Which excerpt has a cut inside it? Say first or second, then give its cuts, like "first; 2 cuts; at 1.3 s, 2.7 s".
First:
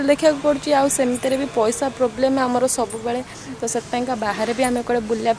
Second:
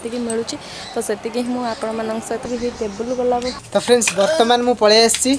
second; 1 cut; at 2.4 s